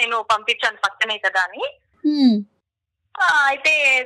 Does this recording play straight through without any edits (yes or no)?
yes